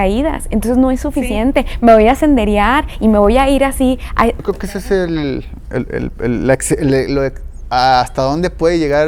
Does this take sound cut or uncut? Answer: cut